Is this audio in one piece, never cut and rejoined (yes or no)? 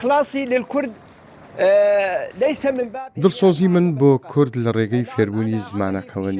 no